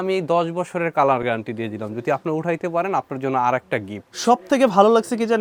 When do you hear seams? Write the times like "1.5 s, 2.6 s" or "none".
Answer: none